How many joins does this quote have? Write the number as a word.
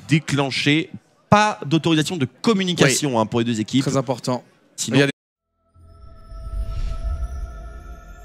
zero